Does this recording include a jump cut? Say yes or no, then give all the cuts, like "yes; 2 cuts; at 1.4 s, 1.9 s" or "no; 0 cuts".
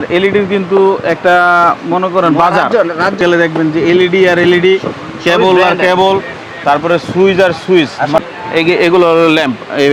yes; 2 cuts; at 3.2 s, 8.2 s